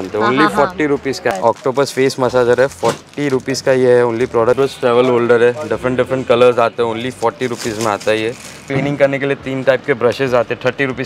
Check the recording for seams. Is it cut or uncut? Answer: cut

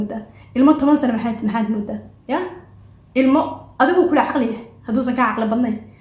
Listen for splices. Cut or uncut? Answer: uncut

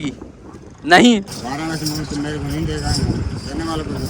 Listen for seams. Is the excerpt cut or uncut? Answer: cut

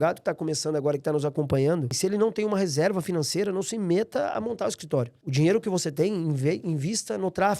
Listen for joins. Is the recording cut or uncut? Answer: cut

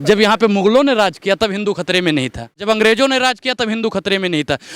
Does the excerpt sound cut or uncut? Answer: cut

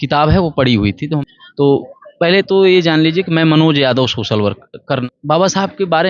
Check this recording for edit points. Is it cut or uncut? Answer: cut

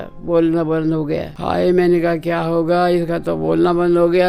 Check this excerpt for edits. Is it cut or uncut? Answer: cut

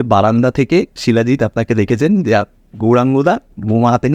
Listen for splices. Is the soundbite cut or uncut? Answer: uncut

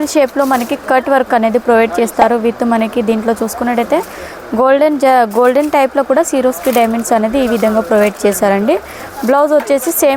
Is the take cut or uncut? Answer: uncut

